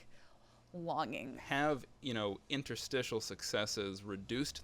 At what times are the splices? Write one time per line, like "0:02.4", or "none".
0:01.3

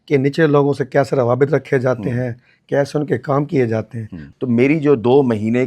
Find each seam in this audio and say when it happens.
0:04.2

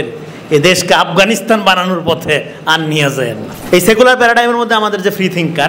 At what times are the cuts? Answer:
0:03.5

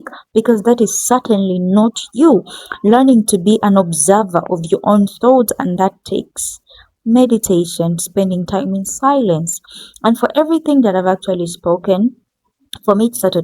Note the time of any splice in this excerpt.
none

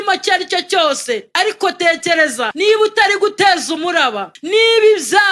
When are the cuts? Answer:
0:01.3
0:02.5
0:04.3

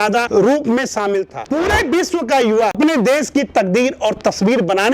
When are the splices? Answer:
0:01.4
0:02.8

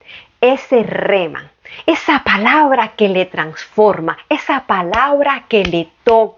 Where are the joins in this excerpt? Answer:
none

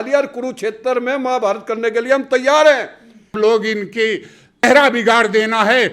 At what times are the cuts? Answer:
0:03.2
0:04.6

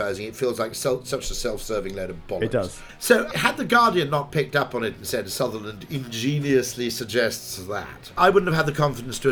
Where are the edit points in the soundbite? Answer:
0:03.1
0:08.2

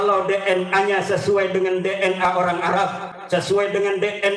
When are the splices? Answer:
none

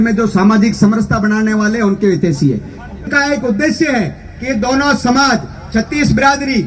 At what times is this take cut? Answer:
0:03.0

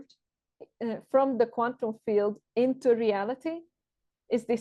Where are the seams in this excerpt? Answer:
none

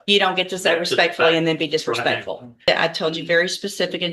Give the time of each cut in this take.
0:02.7

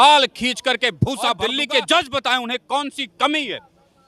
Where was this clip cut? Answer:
0:01.5

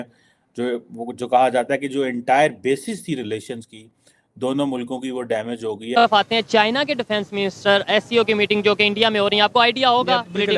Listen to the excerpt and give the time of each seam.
0:05.9

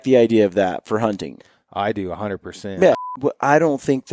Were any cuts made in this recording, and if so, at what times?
0:03.0

